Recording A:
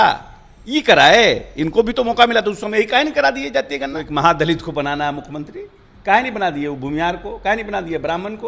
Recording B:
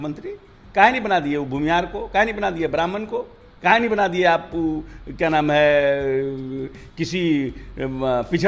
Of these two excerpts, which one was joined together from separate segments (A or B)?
A